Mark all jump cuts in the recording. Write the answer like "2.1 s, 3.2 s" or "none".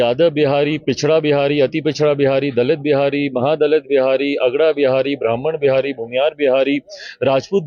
none